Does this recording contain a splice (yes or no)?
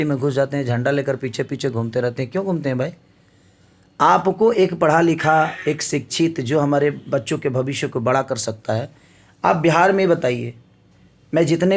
no